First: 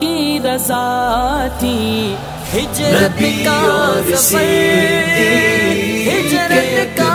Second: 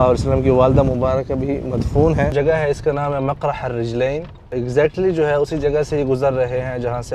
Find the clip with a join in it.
second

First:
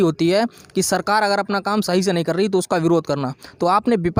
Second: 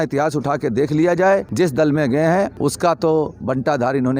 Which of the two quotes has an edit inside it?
second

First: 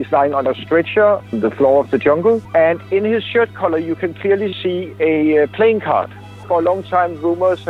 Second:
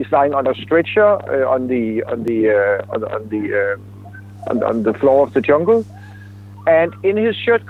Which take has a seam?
first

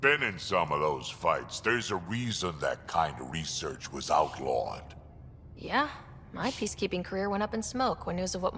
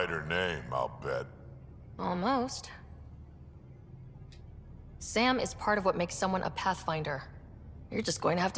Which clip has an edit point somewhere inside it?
second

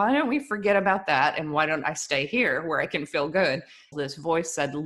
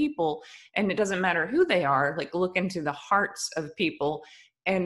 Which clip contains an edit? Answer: first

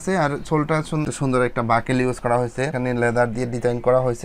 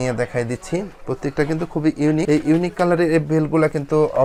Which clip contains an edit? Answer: first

